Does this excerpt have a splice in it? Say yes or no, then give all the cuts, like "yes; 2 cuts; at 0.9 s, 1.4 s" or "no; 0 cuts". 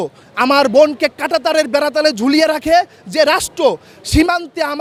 no; 0 cuts